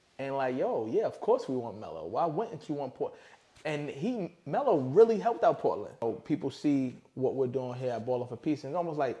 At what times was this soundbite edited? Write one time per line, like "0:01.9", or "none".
0:06.0